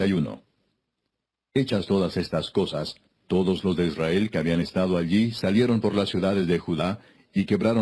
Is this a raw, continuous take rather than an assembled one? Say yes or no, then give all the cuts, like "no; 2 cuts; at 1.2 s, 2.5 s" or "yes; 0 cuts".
no; 1 cut; at 5.8 s